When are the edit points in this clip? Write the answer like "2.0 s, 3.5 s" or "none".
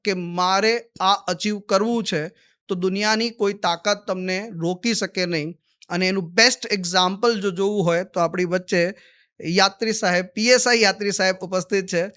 none